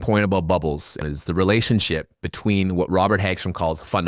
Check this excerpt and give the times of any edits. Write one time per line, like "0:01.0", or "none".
0:01.0

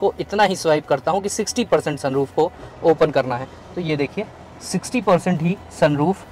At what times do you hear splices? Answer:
none

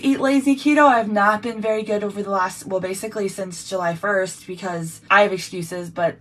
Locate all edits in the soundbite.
0:05.0

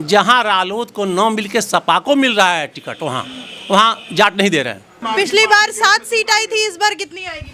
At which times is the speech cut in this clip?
0:04.9

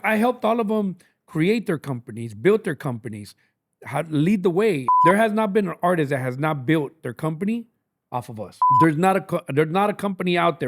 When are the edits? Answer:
0:04.9
0:08.6

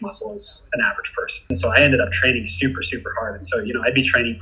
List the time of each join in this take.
0:01.5

